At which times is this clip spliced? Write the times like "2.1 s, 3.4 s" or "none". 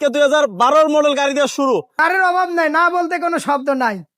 1.9 s